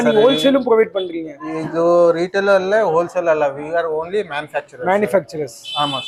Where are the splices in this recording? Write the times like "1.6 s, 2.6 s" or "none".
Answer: none